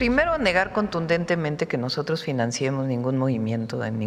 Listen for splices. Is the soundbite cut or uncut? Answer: uncut